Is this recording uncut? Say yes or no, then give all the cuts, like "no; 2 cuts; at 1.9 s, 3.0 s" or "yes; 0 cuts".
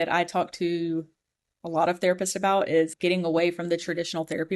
no; 1 cut; at 2.9 s